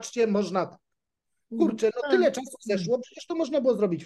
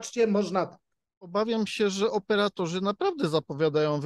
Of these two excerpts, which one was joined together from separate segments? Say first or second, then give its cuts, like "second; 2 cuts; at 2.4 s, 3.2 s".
second; 1 cut; at 1.2 s